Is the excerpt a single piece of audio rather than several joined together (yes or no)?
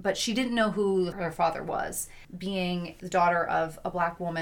no